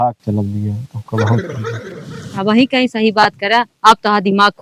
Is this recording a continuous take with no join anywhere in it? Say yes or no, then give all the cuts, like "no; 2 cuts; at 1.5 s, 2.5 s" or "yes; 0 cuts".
yes; 0 cuts